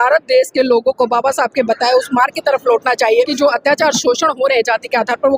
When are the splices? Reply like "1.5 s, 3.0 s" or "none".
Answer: 3.3 s